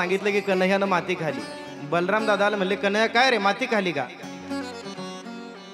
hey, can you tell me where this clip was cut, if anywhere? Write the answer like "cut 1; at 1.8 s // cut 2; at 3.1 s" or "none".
none